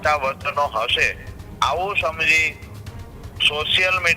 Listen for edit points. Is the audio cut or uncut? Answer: uncut